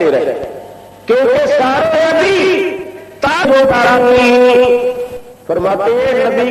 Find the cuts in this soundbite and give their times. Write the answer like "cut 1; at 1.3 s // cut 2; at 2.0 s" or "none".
cut 1; at 3.5 s